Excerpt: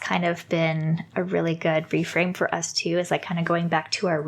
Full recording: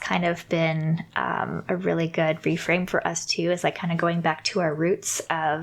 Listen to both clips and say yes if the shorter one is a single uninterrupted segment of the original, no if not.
no